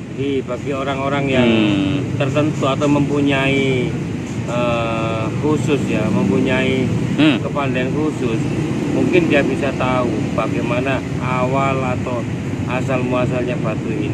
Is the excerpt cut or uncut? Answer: uncut